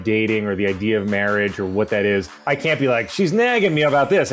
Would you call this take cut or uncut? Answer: cut